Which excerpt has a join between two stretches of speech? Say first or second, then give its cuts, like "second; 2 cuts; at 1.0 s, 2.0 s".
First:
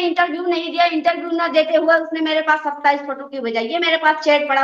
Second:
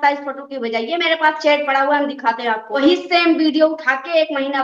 second; 1 cut; at 2.8 s